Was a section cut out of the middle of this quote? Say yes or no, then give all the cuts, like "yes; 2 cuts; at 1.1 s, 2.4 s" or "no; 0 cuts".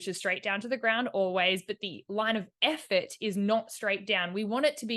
no; 0 cuts